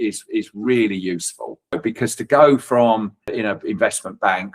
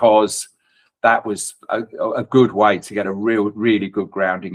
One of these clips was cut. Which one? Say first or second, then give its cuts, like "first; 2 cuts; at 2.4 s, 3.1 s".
first; 2 cuts; at 1.8 s, 3.3 s